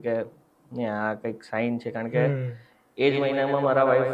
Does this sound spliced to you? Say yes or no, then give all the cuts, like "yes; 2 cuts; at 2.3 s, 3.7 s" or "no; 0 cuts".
no; 0 cuts